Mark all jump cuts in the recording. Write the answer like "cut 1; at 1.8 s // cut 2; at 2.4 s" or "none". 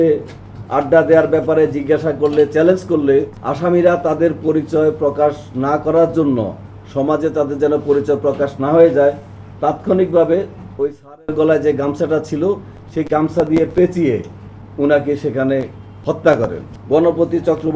cut 1; at 3.4 s // cut 2; at 16.7 s

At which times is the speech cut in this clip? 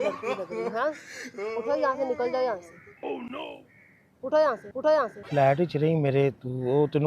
cut 1; at 5.2 s

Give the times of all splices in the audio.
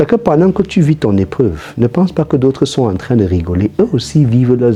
none

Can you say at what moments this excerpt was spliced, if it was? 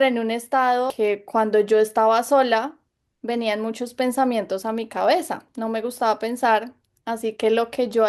cut 1; at 0.9 s // cut 2; at 5.5 s

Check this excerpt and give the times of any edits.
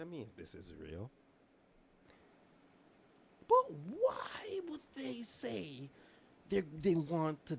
cut 1; at 2.0 s

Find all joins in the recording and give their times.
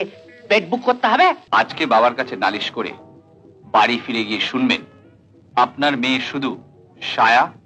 cut 1; at 1.4 s

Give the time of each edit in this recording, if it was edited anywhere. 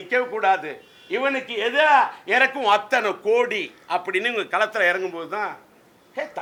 none

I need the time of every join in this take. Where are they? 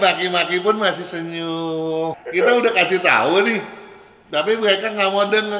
cut 1; at 2.2 s

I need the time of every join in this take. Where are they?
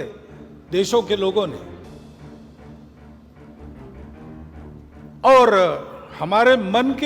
cut 1; at 1.6 s // cut 2; at 4.1 s // cut 3; at 5.1 s

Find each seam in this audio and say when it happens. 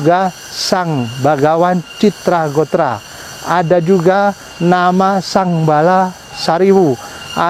none

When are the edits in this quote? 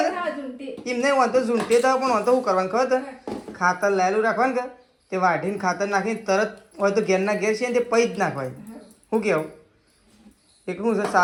none

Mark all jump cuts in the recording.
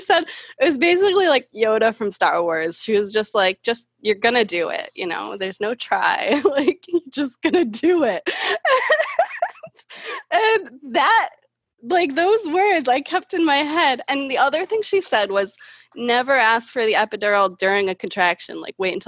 none

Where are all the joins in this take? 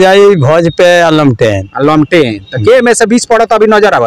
none

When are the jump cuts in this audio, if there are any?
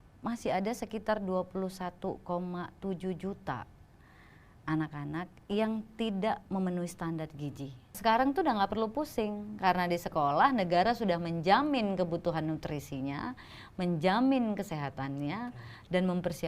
cut 1; at 8.0 s

